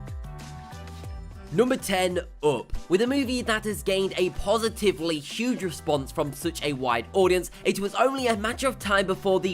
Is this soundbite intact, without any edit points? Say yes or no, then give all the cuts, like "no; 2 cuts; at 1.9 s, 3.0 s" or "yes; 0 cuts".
no; 1 cut; at 3.4 s